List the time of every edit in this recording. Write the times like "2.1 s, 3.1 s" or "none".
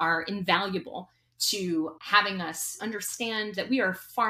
2.7 s